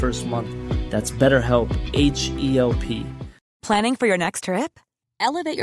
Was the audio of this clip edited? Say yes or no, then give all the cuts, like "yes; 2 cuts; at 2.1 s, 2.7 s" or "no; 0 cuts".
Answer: yes; 1 cut; at 3.6 s